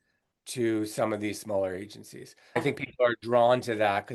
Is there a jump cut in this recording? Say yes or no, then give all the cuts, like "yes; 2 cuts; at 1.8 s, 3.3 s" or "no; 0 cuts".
yes; 1 cut; at 2.6 s